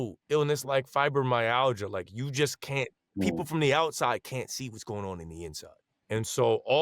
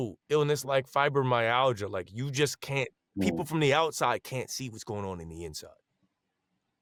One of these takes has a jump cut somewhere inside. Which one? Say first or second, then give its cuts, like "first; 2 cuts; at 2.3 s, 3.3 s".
first; 1 cut; at 5.9 s